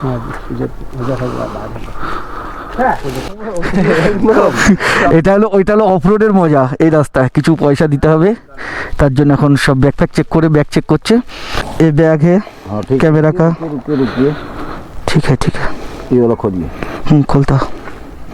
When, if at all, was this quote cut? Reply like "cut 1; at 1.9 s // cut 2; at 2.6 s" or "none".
cut 1; at 3.3 s // cut 2; at 11.6 s